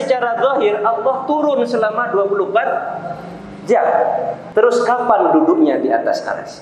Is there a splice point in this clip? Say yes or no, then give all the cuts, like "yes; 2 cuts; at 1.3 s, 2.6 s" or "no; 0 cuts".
yes; 1 cut; at 4.4 s